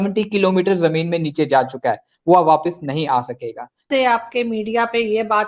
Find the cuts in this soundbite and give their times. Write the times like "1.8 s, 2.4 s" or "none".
3.9 s